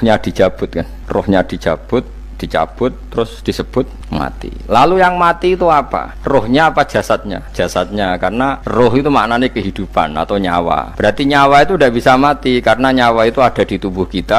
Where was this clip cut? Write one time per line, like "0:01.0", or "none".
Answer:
0:06.1
0:07.4
0:08.6
0:10.9